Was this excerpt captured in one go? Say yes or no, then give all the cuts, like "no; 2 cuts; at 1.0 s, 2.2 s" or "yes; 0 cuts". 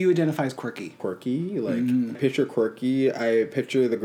no; 2 cuts; at 0.9 s, 2.2 s